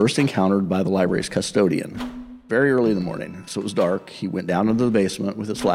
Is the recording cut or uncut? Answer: cut